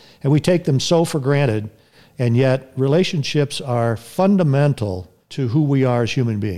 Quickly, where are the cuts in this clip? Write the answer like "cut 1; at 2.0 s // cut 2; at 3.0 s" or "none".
cut 1; at 5.3 s